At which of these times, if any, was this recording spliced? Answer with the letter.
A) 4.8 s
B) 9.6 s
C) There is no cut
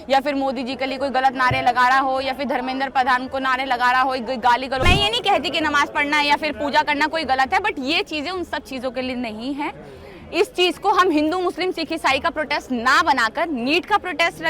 A